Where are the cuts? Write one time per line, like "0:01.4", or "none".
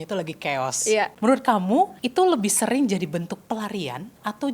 0:01.1
0:02.0